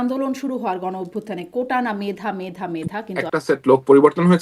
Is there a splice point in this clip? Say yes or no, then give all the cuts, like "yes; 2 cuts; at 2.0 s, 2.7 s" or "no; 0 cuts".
yes; 1 cut; at 3.1 s